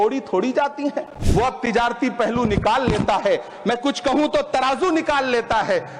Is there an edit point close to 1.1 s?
yes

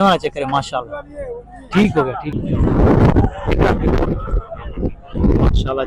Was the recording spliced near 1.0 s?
no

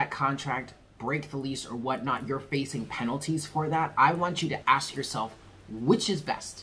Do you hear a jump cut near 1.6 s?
no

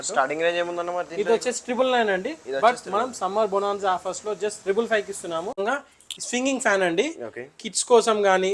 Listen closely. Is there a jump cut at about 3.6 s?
no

